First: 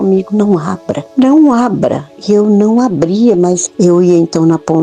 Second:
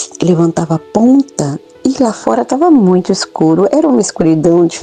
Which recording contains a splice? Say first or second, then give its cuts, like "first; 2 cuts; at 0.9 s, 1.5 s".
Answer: first; 3 cuts; at 1.0 s, 2.1 s, 3.7 s